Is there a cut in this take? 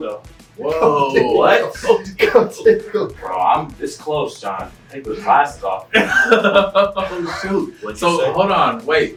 no; 0 cuts

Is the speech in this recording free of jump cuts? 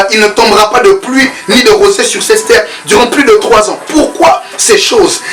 yes; 0 cuts

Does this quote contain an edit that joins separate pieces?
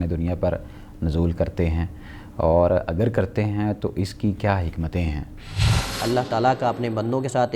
yes; 1 cut; at 5.7 s

